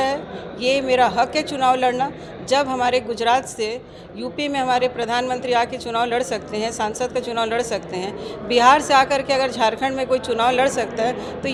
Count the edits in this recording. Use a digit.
0